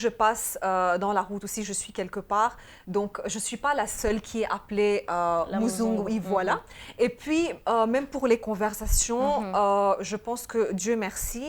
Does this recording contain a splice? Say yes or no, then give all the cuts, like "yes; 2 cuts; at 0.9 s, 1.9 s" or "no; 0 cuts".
no; 0 cuts